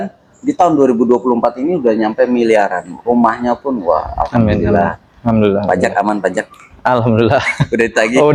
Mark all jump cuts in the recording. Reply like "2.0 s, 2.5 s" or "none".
none